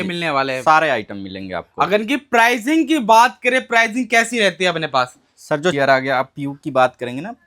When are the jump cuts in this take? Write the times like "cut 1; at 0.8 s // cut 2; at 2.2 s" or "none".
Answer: cut 1; at 5.7 s